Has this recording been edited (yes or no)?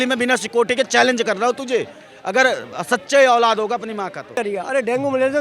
yes